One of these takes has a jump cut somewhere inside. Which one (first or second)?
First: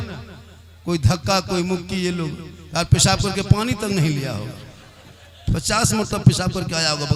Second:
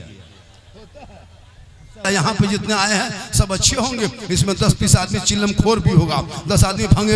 second